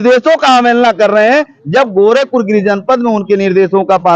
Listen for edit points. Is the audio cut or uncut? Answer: uncut